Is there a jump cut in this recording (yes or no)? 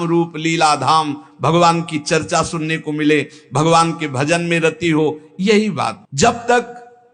no